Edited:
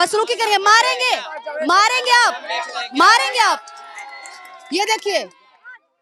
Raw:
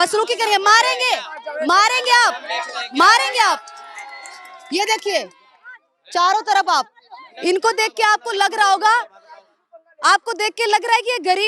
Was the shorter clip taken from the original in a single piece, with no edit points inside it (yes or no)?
yes